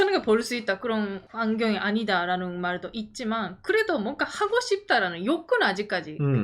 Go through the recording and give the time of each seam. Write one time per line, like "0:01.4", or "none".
0:01.2